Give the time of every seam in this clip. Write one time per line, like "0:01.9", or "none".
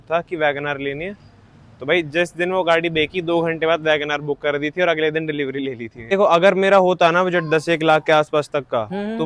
0:06.1